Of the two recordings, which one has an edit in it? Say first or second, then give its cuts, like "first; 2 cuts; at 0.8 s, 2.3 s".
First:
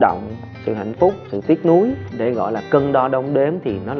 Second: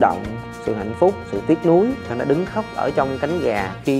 second; 1 cut; at 2.0 s